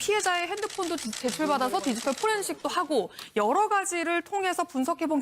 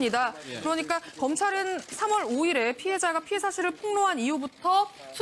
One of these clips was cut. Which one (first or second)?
first